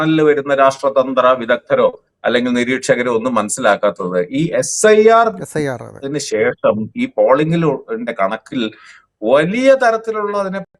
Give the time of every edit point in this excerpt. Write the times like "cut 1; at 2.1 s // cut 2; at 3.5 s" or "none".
none